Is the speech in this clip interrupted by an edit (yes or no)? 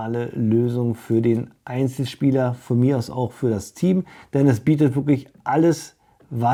no